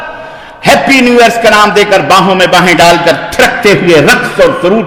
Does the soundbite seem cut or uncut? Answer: uncut